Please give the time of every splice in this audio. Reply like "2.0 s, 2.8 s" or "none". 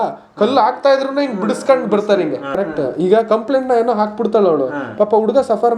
none